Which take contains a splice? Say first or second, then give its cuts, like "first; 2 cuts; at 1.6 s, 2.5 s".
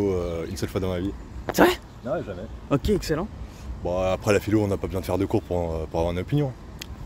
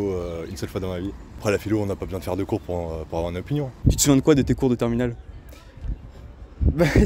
second; 2 cuts; at 1.4 s, 3.7 s